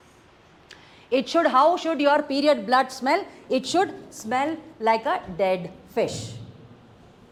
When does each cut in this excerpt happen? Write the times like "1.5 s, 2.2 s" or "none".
none